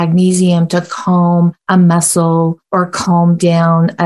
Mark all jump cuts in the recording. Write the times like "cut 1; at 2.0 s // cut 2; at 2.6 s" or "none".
cut 1; at 1.6 s // cut 2; at 2.6 s

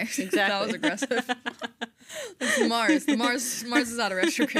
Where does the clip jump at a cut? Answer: none

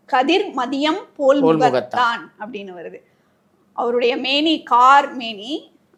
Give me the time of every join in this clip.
none

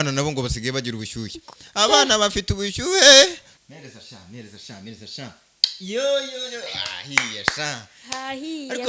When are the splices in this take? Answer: cut 1; at 3.5 s

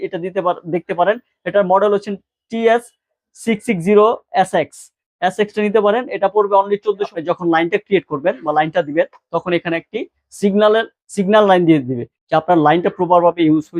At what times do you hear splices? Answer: cut 1; at 7.1 s

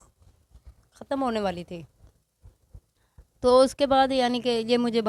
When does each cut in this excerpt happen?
none

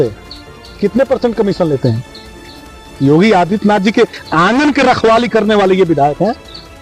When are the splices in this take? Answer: none

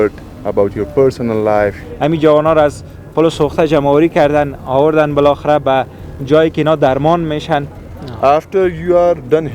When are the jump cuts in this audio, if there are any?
cut 1; at 1.8 s // cut 2; at 7.8 s

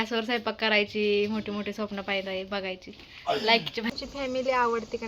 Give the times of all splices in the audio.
cut 1; at 3.9 s

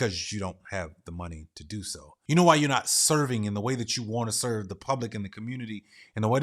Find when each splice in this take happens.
cut 1; at 2.0 s

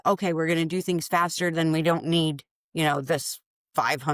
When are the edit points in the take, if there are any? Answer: none

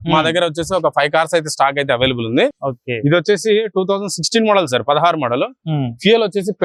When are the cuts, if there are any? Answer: none

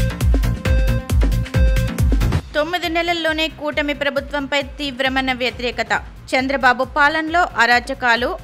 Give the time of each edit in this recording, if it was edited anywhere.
cut 1; at 2.4 s

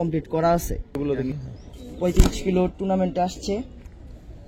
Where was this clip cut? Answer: cut 1; at 1.0 s

